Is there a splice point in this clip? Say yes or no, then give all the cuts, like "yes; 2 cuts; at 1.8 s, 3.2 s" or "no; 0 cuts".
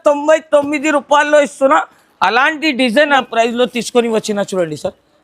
yes; 1 cut; at 3.2 s